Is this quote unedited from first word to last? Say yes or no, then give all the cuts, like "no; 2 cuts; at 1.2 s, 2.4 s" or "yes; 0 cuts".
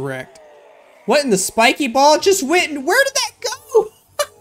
yes; 0 cuts